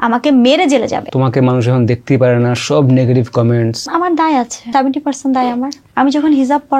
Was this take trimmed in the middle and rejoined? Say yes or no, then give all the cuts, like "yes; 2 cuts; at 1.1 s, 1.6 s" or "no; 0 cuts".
yes; 4 cuts; at 1.1 s, 3.8 s, 4.6 s, 5.8 s